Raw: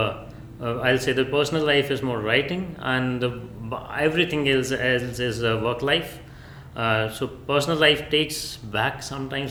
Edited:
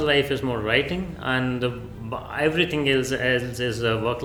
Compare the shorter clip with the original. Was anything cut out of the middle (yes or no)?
no